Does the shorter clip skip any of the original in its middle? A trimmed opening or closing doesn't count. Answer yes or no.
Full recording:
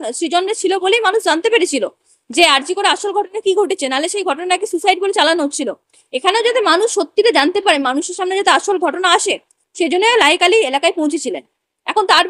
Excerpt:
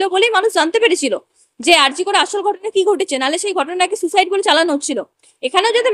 no